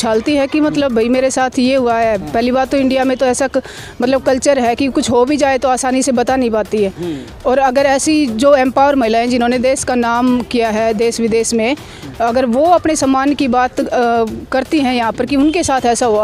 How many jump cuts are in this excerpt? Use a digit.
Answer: 0